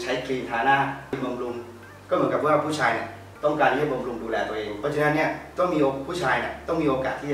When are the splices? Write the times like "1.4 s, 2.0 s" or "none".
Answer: 1.2 s, 4.7 s

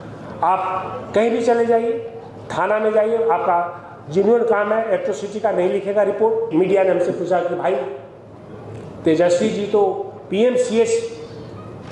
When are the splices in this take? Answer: 6.5 s

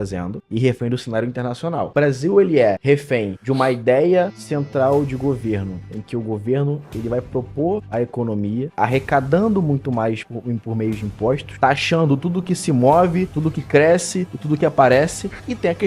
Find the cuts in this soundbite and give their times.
1.9 s

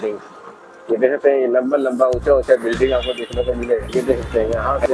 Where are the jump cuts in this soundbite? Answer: 3.9 s

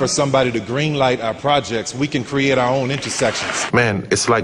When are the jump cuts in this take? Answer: 3.5 s

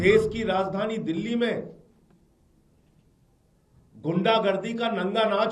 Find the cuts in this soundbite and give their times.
none

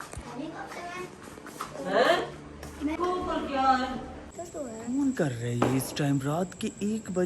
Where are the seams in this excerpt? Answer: 3.0 s, 4.2 s

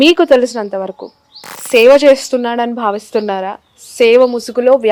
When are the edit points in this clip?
none

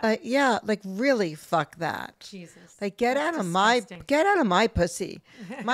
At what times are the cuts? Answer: none

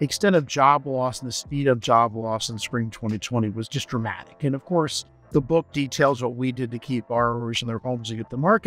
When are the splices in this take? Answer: 5.2 s

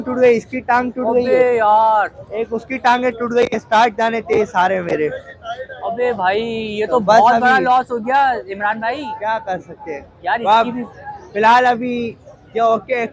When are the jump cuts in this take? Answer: none

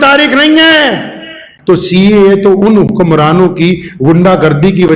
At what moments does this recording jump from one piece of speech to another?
1.5 s

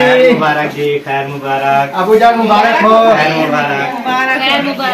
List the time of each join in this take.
3.9 s

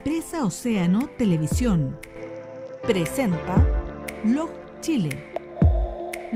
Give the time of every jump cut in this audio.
none

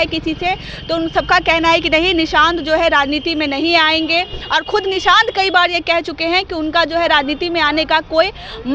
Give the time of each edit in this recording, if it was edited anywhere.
none

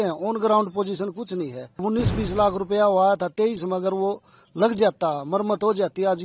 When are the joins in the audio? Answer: 1.8 s

